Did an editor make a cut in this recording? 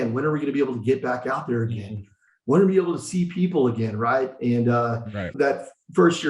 yes; 1 cut; at 5.3 s

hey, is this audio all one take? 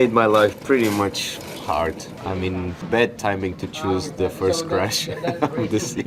yes; 0 cuts

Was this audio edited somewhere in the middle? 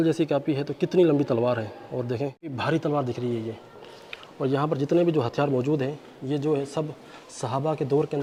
no; 0 cuts

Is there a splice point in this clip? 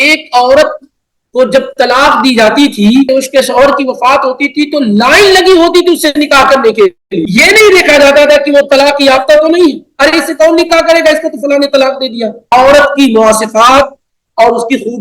yes; 3 cuts; at 3.1 s, 7.1 s, 12.5 s

